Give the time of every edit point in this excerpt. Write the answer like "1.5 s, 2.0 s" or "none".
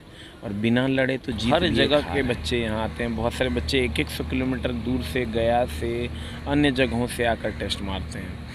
1.5 s